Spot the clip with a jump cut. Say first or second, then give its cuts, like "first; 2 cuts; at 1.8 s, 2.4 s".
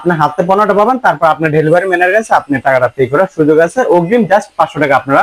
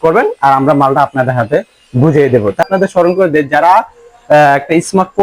second; 1 cut; at 2.7 s